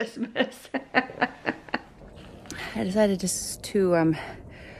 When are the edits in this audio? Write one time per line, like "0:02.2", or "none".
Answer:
none